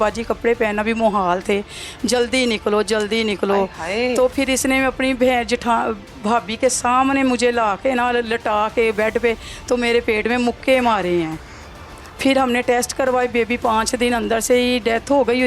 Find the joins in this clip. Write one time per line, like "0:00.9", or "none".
none

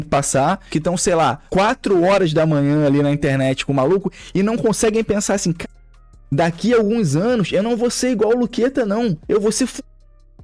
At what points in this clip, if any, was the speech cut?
none

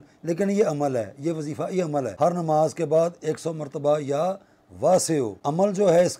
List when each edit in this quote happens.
0:02.1
0:05.4

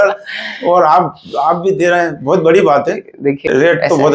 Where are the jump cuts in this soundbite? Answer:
0:03.2

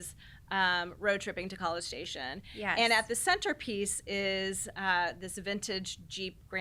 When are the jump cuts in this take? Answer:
none

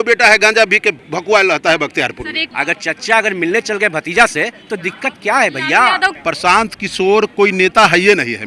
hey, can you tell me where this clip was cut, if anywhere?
0:02.4
0:06.1

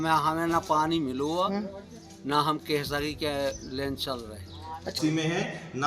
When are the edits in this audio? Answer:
0:04.9

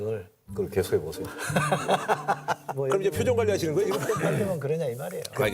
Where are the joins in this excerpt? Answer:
0:04.0

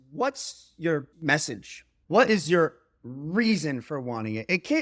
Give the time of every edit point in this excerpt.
0:01.1

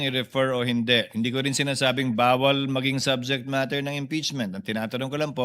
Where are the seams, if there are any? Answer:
none

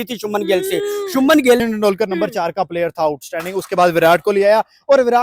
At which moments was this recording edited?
0:01.6

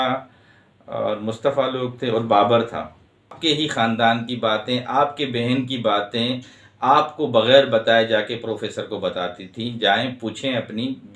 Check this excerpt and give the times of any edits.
0:03.4

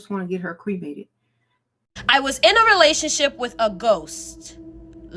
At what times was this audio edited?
0:01.8

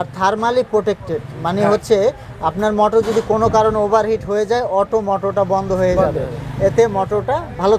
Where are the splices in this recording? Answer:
none

